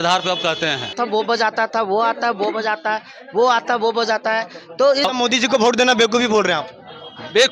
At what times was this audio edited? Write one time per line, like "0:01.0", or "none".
0:00.9
0:05.1